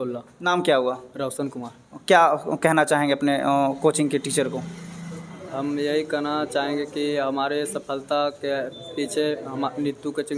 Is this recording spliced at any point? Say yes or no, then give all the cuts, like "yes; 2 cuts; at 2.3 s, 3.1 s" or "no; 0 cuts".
no; 0 cuts